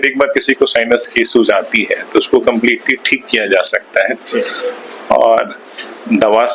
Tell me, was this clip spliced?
no; 0 cuts

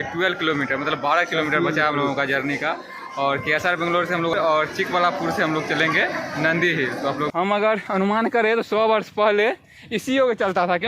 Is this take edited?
yes; 2 cuts; at 4.3 s, 7.3 s

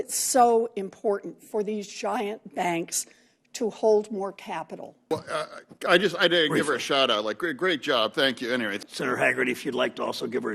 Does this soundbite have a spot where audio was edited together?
yes; 2 cuts; at 5.1 s, 8.8 s

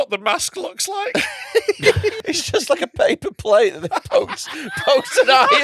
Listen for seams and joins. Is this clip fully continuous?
no; 1 cut; at 2.2 s

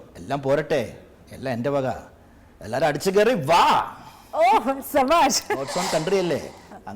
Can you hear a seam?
yes; 1 cut; at 5.6 s

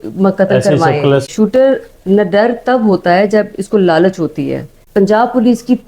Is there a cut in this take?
yes; 2 cuts; at 1.3 s, 4.8 s

